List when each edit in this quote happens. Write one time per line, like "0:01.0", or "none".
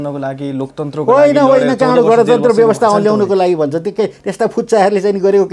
none